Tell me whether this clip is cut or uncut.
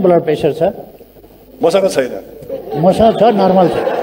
uncut